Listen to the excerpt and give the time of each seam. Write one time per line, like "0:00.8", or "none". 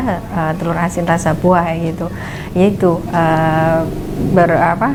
none